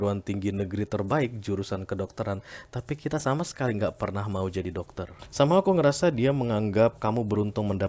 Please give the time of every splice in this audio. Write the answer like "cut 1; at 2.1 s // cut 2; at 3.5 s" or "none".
cut 1; at 5.2 s